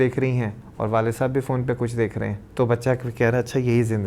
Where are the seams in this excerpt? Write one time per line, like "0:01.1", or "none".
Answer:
0:02.4